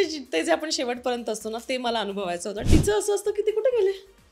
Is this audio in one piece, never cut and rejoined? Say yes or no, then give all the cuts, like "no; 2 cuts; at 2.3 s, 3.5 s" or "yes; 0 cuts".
no; 1 cut; at 2.7 s